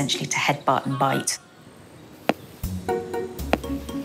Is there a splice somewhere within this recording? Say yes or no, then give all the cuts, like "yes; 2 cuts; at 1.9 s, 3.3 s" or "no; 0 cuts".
no; 0 cuts